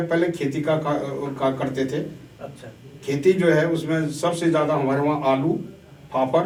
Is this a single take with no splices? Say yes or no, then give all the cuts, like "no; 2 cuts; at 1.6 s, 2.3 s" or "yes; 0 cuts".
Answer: yes; 0 cuts